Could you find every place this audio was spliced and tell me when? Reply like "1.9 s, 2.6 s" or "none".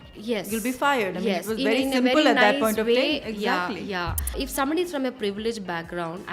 4.4 s